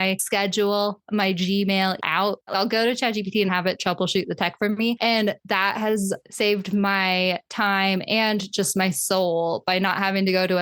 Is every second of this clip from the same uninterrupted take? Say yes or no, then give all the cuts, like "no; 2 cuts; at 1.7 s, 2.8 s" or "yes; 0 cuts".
no; 2 cuts; at 2.2 s, 3.5 s